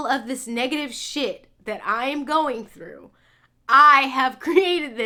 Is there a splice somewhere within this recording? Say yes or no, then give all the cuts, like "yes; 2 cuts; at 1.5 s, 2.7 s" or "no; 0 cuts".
no; 0 cuts